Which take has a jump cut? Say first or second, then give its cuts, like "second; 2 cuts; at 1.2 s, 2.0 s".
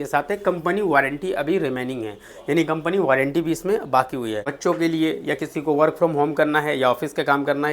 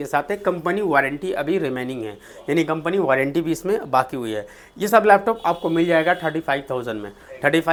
first; 1 cut; at 4.5 s